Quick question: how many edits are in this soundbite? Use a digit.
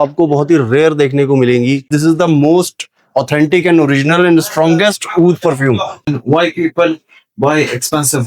2